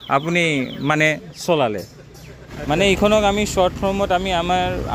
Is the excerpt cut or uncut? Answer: cut